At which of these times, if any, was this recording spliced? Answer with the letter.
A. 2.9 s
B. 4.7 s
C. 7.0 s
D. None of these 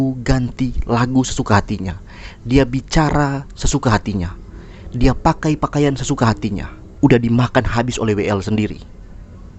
C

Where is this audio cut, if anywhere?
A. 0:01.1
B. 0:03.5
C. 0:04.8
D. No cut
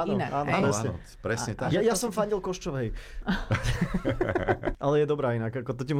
C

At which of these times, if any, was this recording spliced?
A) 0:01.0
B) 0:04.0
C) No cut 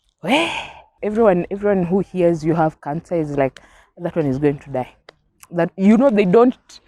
A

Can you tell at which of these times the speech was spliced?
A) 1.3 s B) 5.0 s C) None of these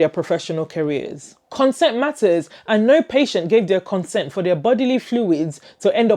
A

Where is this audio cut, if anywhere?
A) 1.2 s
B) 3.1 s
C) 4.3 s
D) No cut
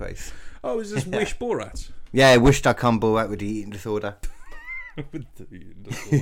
C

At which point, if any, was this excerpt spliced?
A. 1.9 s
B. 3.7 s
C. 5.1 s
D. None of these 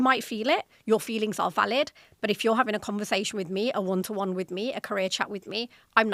D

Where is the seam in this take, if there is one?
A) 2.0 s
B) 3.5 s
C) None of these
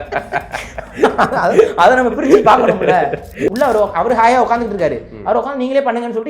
B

